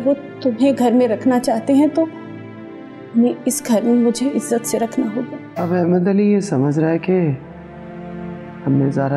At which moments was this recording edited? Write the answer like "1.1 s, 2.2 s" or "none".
5.4 s